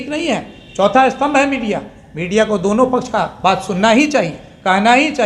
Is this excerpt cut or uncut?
uncut